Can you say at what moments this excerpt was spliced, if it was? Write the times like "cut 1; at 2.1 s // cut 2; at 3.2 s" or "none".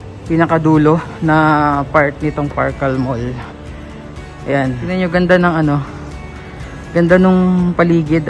cut 1; at 4.8 s